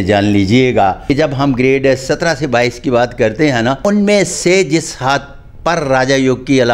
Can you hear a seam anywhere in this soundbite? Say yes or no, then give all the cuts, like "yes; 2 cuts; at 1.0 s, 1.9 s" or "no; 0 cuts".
yes; 2 cuts; at 1.0 s, 3.8 s